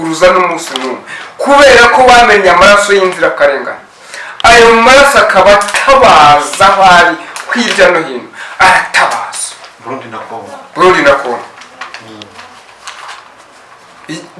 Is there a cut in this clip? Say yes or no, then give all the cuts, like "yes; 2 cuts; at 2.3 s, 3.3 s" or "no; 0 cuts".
no; 0 cuts